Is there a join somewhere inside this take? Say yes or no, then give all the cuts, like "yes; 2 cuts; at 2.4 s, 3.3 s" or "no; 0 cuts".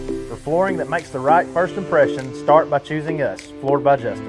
no; 0 cuts